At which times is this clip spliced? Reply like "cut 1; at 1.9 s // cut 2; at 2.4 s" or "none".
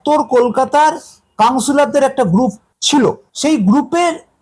cut 1; at 3.2 s